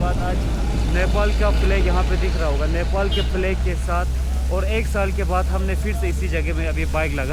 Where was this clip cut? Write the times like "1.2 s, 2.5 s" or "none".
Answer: none